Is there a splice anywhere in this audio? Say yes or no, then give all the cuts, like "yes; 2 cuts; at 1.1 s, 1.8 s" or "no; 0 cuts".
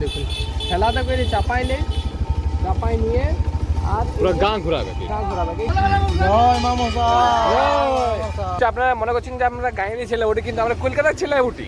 yes; 2 cuts; at 5.7 s, 8.6 s